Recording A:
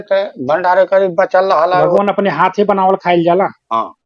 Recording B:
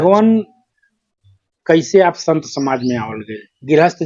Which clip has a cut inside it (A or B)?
A